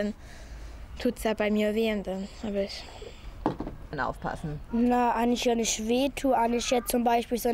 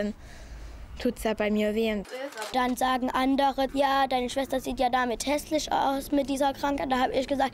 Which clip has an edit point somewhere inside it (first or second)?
second